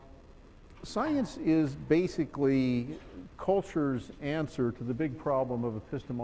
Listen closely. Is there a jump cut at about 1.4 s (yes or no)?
no